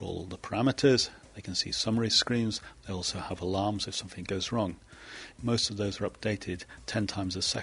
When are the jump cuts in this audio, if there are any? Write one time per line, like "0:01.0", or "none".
0:05.2